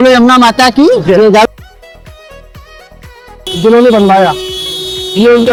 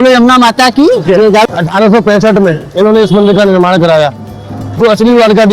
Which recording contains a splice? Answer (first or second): second